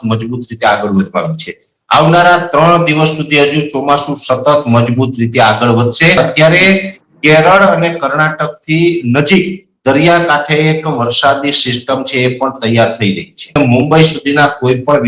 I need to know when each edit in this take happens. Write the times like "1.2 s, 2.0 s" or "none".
6.2 s, 13.5 s